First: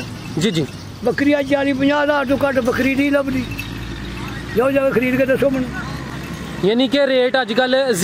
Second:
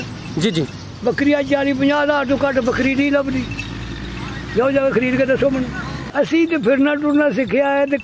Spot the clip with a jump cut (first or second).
second